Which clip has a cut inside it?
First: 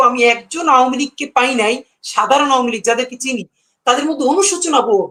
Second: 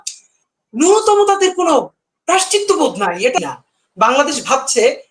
second; 1 cut; at 3.4 s

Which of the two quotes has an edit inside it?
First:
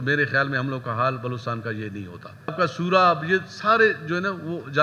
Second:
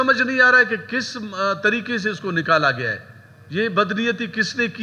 first; 1 cut; at 2.5 s

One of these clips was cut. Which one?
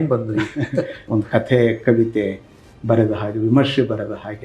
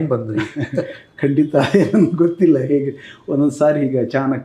first; 1 cut; at 1.0 s

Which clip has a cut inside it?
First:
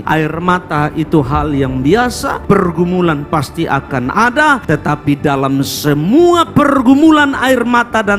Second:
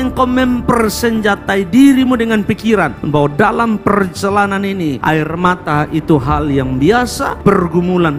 first; 1 cut; at 4.6 s

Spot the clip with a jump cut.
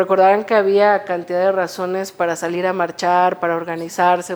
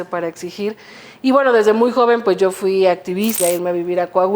second; 1 cut; at 3.4 s

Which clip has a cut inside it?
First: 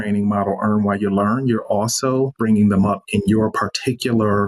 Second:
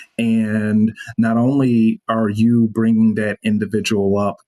first; 1 cut; at 2.4 s

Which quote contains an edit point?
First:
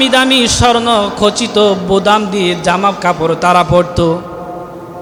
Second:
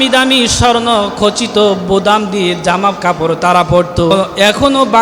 second; 1 cut; at 4.1 s

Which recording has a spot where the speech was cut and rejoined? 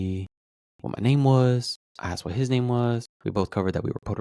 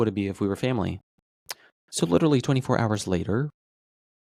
first; 1 cut; at 3.1 s

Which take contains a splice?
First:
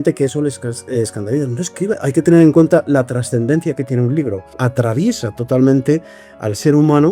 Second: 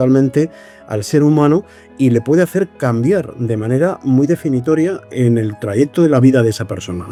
first; 2 cuts; at 2.0 s, 4.6 s

